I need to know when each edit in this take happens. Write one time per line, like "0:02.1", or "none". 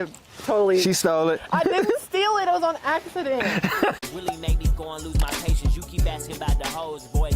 0:04.1